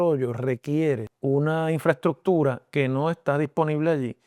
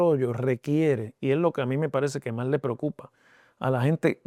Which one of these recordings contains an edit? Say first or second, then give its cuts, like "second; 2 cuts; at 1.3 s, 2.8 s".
first; 1 cut; at 1.1 s